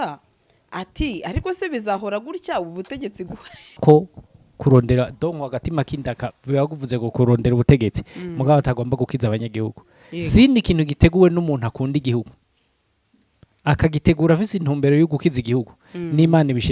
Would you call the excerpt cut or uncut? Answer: cut